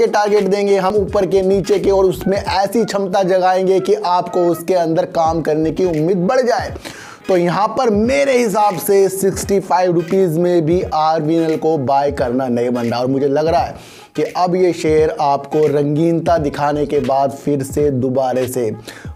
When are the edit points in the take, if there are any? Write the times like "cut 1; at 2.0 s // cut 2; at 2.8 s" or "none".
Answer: none